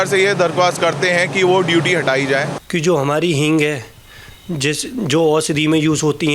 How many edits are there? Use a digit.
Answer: 1